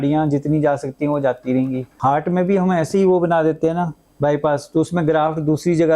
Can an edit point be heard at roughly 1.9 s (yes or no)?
yes